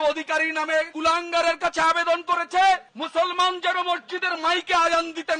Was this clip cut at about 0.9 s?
yes; 1 cut; at 0.9 s

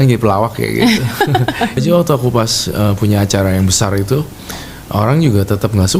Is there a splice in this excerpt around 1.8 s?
yes; 1 cut; at 1.8 s

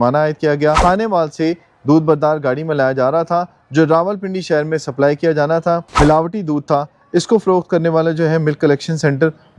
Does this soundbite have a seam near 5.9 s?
yes; 2 cuts; at 0.8 s, 5.9 s

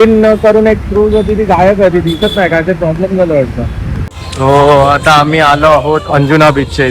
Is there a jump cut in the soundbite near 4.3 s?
yes; 1 cut; at 4.3 s

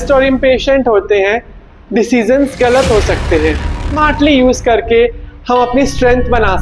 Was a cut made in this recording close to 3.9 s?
yes; 1 cut; at 3.9 s

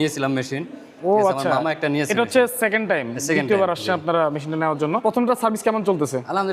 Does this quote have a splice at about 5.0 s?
yes; 1 cut; at 5.0 s

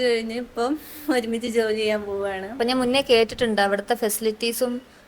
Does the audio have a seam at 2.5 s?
yes; 1 cut; at 2.5 s

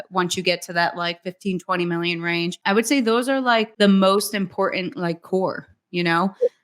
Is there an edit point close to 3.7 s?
yes; 2 cuts; at 2.6 s, 3.7 s

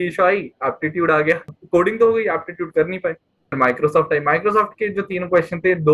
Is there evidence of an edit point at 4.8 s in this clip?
no; 2 cuts; at 1.6 s, 3.6 s

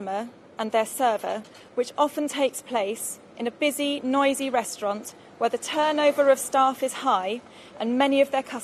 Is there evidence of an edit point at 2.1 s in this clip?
no; 0 cuts

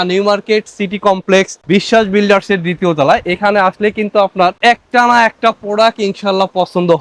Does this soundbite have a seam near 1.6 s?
no; 0 cuts

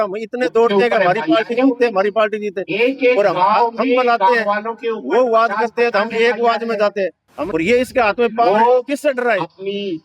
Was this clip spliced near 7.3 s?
yes; 1 cut; at 7.3 s

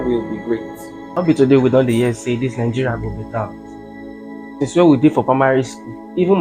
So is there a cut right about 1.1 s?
yes; 1 cut; at 1.1 s

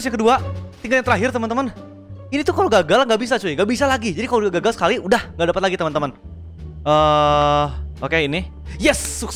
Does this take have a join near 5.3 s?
no; 0 cuts

